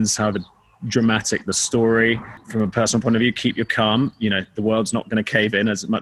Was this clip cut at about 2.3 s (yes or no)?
yes